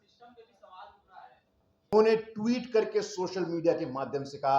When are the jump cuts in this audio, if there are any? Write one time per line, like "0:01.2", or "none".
0:01.9